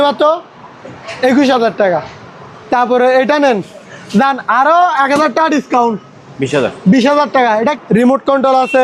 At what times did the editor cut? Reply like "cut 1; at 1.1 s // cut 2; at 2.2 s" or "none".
cut 1; at 7.7 s